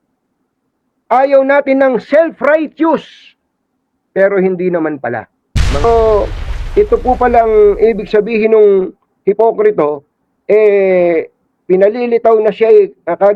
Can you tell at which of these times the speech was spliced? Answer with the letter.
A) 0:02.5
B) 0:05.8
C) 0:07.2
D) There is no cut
B